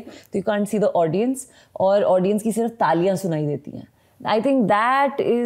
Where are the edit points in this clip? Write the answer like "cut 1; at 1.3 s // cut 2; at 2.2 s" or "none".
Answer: none